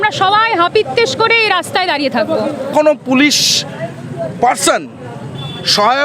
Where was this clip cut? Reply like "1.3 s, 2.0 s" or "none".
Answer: 2.7 s